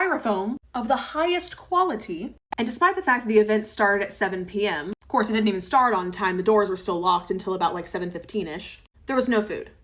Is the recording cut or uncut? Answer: cut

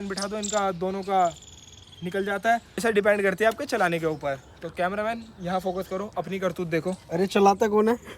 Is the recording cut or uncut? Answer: cut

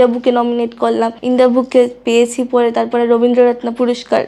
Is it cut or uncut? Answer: cut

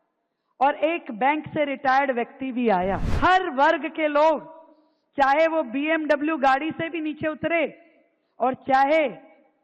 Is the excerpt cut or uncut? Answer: cut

